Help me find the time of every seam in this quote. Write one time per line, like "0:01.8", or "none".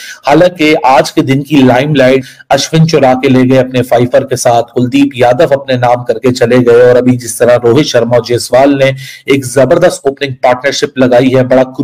0:02.3